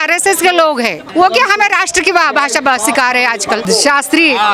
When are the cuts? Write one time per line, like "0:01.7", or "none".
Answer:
0:01.0
0:03.6